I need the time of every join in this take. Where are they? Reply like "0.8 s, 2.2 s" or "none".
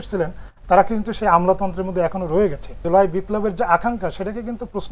2.7 s